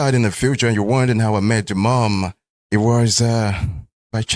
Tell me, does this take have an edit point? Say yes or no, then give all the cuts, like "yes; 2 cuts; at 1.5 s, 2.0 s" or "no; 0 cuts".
no; 0 cuts